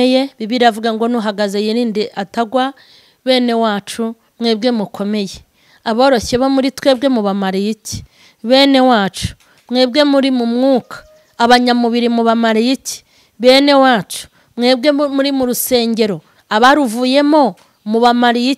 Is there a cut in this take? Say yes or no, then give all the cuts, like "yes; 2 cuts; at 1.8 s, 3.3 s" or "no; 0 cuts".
no; 0 cuts